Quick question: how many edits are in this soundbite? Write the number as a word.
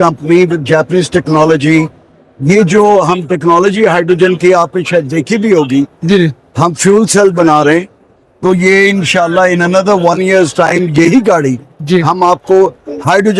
zero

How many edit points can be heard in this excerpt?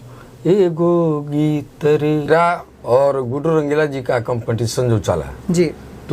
one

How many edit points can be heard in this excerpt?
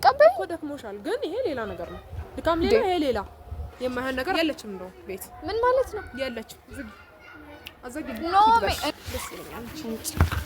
two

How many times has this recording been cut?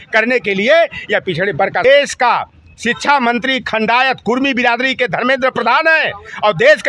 one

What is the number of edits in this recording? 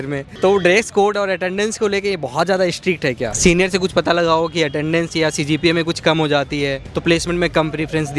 one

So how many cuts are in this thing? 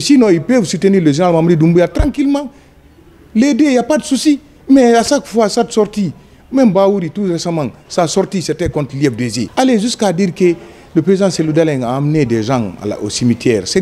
one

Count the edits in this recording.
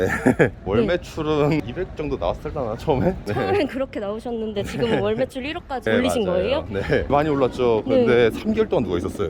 one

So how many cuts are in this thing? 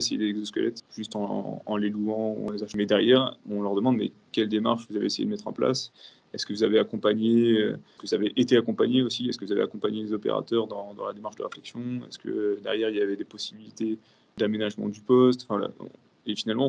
four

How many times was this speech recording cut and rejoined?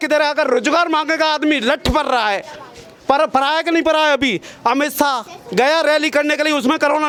zero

